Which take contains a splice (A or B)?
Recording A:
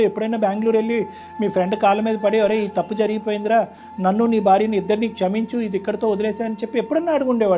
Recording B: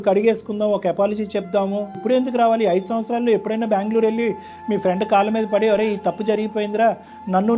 B